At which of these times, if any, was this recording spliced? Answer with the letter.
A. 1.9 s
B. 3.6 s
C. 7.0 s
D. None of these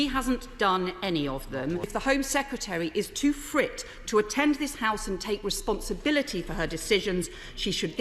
A